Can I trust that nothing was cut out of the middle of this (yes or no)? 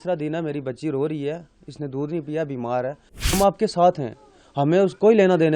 no